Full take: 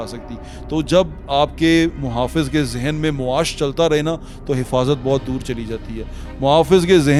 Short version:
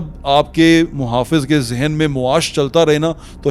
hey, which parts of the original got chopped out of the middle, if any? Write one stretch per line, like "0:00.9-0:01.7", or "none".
none